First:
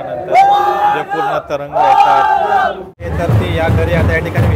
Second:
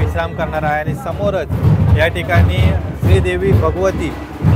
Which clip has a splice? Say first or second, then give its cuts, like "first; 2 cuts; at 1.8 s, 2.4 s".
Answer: first; 1 cut; at 3.1 s